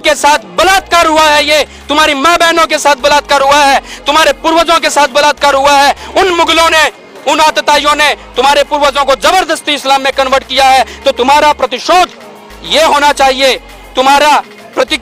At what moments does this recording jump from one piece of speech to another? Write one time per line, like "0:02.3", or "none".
none

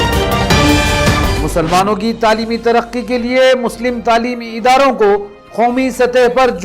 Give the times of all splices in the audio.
0:00.9

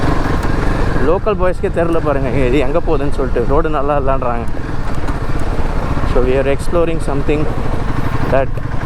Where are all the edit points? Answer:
none

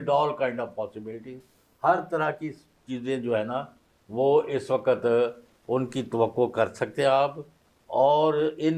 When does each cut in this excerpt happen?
none

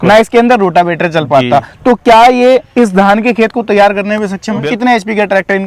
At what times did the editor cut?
0:04.6

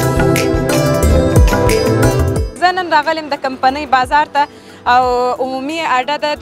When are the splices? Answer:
0:02.5

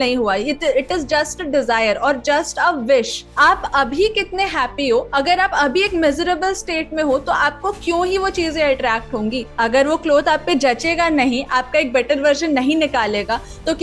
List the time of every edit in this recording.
0:03.2
0:09.5

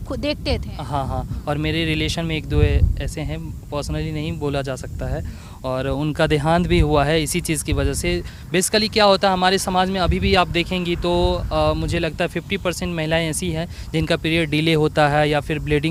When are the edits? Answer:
none

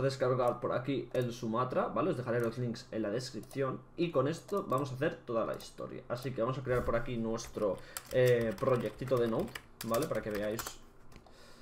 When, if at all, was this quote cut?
none

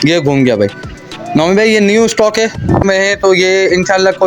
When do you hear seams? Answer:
0:02.8

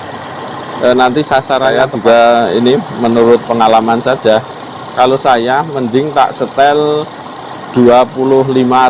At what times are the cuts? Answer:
0:01.8

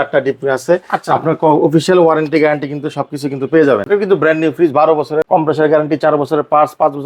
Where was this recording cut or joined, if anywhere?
0:03.8
0:05.3

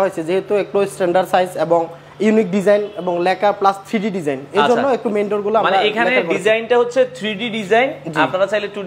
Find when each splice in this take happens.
none

